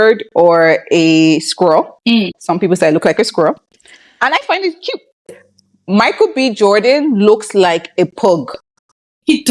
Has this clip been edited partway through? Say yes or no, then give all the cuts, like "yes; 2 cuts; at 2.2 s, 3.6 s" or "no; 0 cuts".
yes; 1 cut; at 5.4 s